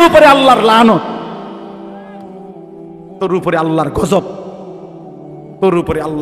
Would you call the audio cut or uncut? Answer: uncut